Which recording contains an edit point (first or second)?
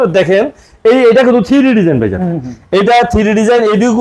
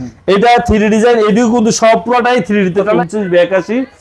second